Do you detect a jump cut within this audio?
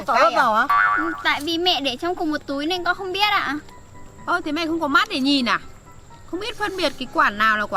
yes; 1 cut; at 1.0 s

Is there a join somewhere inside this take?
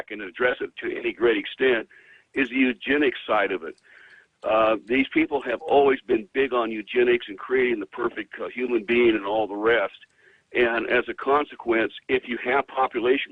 no; 0 cuts

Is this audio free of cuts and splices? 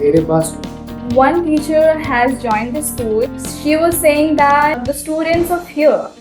no; 3 cuts; at 1.0 s, 3.4 s, 4.8 s

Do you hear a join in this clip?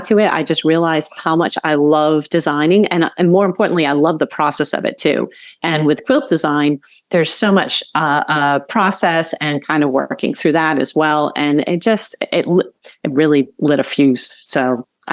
no; 0 cuts

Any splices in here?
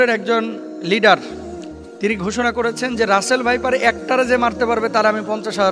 no; 0 cuts

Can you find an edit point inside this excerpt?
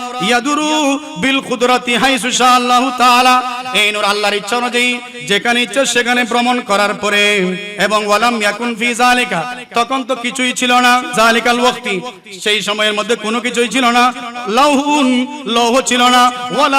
yes; 2 cuts; at 7.7 s, 11.1 s

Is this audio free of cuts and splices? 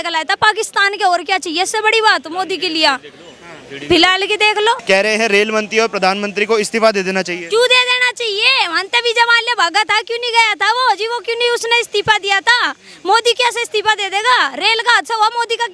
no; 1 cut; at 4.8 s

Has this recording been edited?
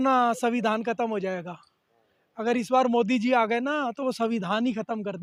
no; 0 cuts

